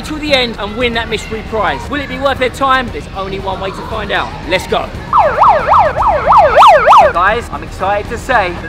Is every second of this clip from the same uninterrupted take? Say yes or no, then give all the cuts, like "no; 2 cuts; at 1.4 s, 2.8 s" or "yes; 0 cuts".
no; 1 cut; at 7.1 s